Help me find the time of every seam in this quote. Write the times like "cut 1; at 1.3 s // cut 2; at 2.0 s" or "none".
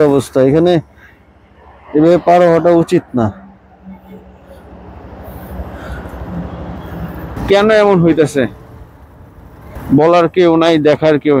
cut 1; at 7.4 s // cut 2; at 9.7 s